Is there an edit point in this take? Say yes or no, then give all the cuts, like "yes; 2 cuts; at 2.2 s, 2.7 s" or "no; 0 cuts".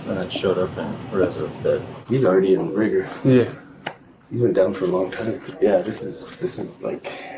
yes; 2 cuts; at 1.9 s, 5.4 s